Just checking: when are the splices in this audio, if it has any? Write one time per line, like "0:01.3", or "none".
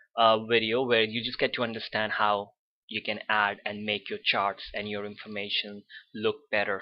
0:03.5